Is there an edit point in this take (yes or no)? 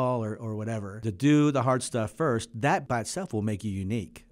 yes